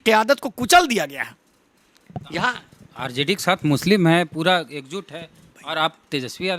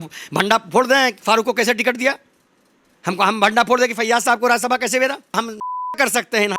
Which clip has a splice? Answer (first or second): second